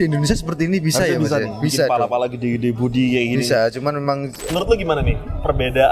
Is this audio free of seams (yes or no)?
no